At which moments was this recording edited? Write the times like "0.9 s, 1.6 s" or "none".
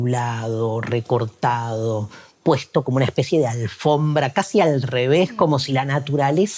none